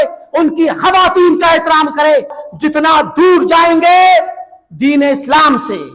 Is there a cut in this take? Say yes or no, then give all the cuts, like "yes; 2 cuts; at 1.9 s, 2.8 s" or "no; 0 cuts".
yes; 1 cut; at 2.4 s